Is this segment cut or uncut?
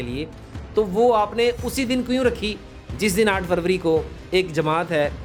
uncut